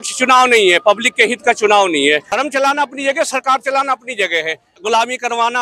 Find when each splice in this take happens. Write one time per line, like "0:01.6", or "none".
0:02.3
0:04.7